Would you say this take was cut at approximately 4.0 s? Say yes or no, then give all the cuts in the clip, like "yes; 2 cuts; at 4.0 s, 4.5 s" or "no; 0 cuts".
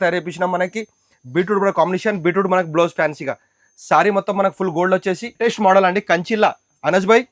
no; 1 cut; at 5.3 s